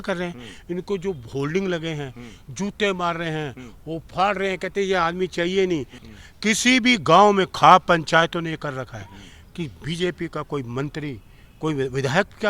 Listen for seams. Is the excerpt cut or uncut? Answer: cut